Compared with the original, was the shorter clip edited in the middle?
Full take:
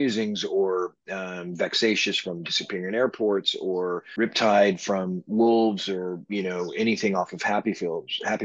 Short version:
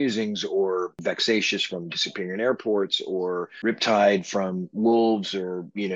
yes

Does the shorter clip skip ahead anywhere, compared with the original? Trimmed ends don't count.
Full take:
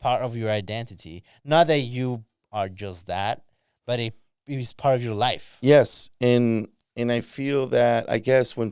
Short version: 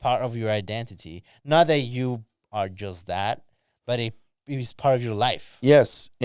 no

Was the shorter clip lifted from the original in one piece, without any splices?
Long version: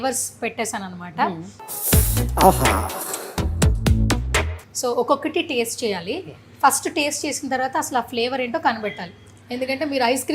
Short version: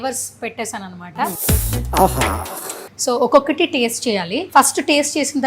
no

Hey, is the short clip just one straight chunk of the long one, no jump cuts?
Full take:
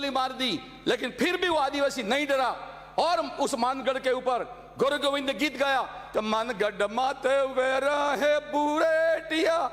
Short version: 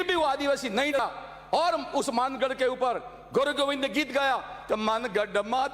no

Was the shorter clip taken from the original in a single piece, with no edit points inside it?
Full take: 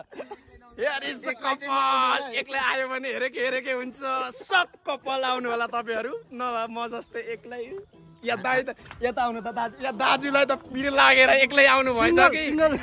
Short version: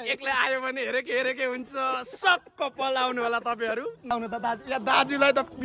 no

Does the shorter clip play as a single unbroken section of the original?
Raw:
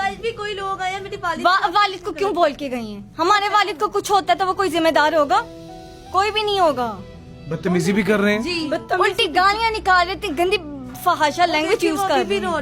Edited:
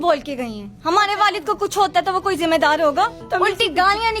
no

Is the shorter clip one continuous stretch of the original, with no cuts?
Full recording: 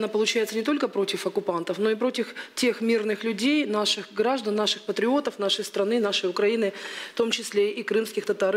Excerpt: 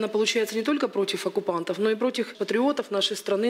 no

